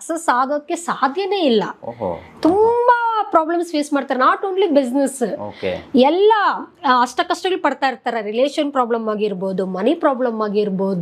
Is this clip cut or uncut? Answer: uncut